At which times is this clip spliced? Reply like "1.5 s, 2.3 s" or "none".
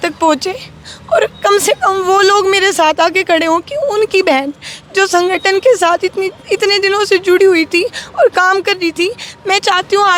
none